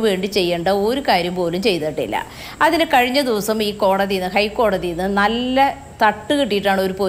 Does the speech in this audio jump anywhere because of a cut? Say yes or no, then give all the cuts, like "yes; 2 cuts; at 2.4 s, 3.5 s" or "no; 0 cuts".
no; 0 cuts